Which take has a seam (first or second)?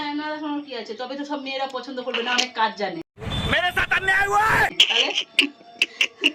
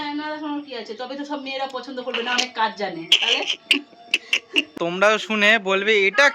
second